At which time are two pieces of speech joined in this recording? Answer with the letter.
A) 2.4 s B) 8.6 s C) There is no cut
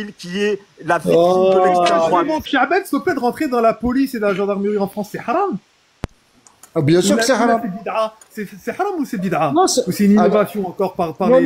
A